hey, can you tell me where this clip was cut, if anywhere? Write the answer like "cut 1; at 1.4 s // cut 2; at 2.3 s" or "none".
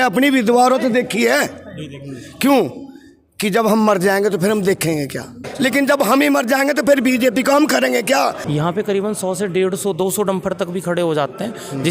cut 1; at 5.4 s // cut 2; at 8.4 s